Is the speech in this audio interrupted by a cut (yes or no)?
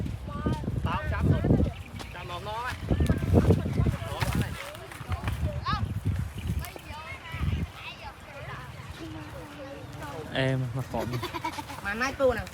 no